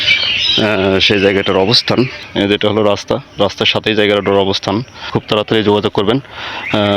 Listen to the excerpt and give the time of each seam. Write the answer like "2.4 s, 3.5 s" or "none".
2.3 s, 5.2 s